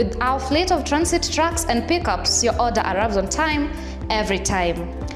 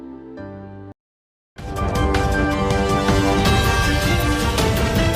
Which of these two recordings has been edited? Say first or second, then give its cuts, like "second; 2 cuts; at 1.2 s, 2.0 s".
second; 1 cut; at 1.3 s